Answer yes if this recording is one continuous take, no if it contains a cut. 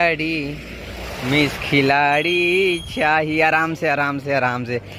yes